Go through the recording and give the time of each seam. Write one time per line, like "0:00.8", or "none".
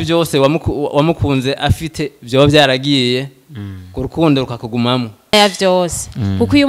0:05.3